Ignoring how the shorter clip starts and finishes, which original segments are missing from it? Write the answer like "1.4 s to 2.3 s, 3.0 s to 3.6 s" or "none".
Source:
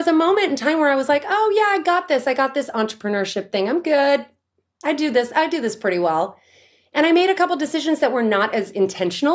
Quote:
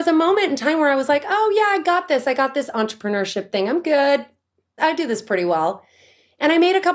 4.8 s to 5.3 s